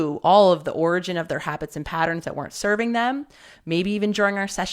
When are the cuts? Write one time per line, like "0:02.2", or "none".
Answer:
none